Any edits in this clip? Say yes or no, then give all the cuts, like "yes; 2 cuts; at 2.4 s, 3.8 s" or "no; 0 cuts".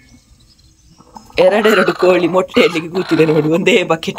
yes; 1 cut; at 1.2 s